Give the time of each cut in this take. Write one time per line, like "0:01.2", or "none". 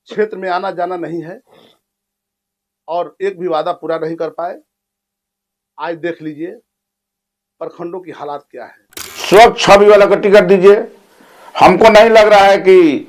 0:09.4